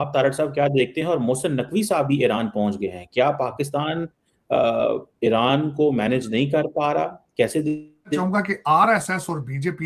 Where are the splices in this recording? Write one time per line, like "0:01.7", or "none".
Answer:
0:08.1